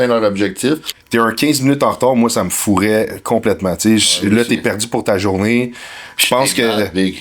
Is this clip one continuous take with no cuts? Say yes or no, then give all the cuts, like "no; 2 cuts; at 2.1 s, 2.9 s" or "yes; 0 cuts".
no; 1 cut; at 0.9 s